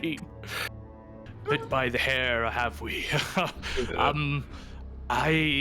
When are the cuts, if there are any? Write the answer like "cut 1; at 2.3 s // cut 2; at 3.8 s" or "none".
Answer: cut 1; at 1.2 s